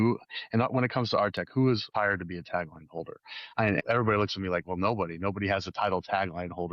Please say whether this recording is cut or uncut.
cut